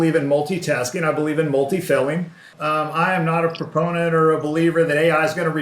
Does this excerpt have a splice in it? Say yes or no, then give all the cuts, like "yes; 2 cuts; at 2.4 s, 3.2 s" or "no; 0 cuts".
yes; 1 cut; at 2.5 s